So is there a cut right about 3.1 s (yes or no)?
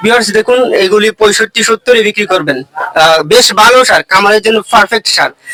no